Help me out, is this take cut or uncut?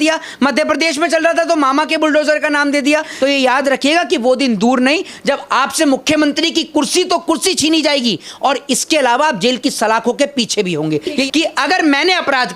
cut